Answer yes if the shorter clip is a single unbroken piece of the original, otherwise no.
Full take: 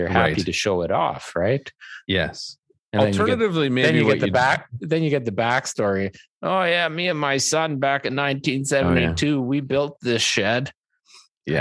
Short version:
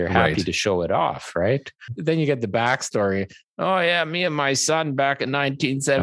no